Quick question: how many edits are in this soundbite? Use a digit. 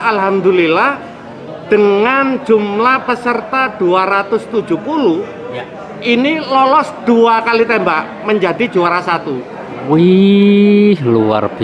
0